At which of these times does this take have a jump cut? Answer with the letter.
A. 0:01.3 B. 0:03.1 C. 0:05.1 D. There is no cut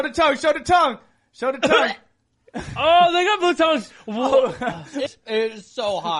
C